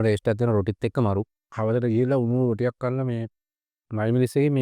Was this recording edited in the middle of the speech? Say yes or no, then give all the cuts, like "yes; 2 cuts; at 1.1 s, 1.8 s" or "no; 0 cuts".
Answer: yes; 1 cut; at 1.4 s